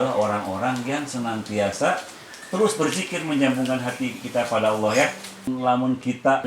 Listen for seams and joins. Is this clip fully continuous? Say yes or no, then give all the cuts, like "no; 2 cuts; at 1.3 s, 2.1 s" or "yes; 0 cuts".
no; 1 cut; at 5.3 s